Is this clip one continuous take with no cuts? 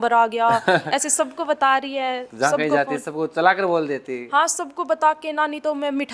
yes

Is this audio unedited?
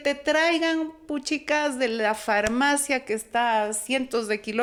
yes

